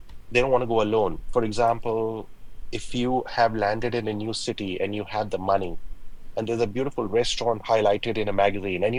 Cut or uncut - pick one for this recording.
uncut